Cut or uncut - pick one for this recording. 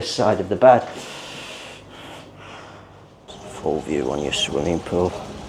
cut